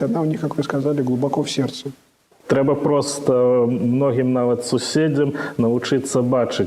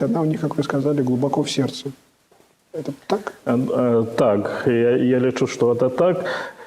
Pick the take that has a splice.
first; 1 cut; at 2.4 s

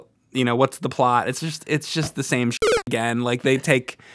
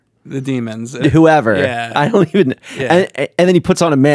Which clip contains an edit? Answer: second; 1 cut; at 1.0 s

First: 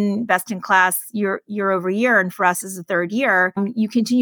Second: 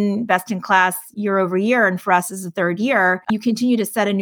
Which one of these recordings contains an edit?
second; 2 cuts; at 1.1 s, 3.2 s

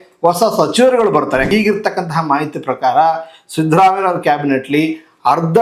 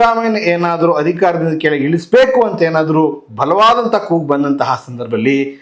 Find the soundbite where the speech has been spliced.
first; 1 cut; at 1.5 s

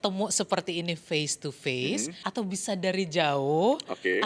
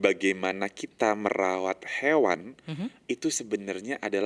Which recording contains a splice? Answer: first; 1 cut; at 2.2 s

